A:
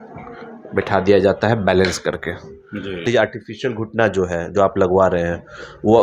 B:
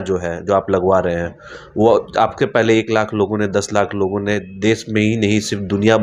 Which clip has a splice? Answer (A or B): A